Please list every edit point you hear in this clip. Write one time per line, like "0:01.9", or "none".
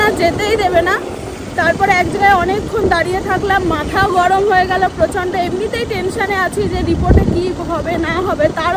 none